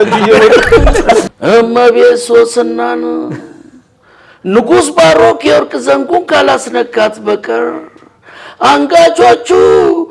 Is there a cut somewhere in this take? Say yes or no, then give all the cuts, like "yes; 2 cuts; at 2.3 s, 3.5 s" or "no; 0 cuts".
yes; 1 cut; at 1.2 s